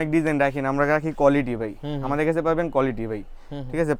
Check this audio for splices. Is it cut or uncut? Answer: uncut